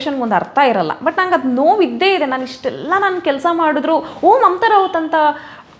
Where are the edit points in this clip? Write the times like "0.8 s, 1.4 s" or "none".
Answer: none